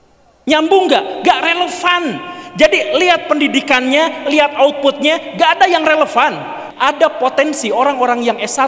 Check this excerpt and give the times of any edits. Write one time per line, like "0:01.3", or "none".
0:06.6